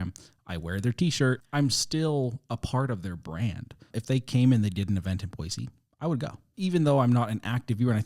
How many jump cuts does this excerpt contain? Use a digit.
3